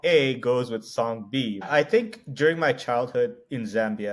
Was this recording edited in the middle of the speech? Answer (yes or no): yes